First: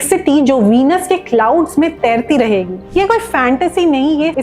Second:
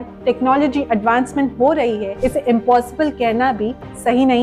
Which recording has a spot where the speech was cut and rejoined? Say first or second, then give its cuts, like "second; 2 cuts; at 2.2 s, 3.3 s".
first; 1 cut; at 2.8 s